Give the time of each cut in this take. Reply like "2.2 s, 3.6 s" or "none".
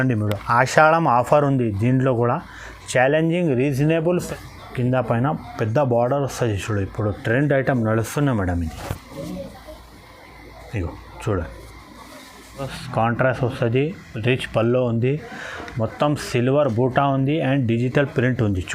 4.2 s, 12.8 s